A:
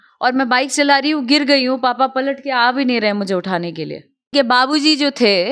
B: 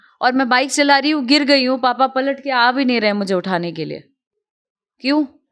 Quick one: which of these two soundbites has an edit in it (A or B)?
A